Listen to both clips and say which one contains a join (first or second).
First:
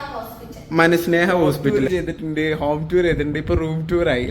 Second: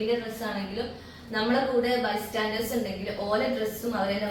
first